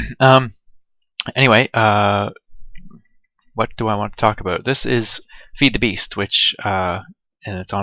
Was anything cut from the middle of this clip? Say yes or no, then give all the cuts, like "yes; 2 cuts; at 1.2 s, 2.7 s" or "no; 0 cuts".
yes; 1 cut; at 2.6 s